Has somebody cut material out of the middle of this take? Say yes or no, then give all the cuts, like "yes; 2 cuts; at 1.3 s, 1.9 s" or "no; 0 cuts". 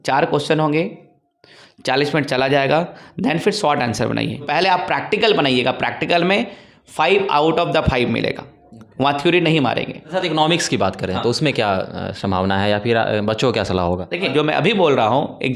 yes; 3 cuts; at 4.5 s, 10.0 s, 14.3 s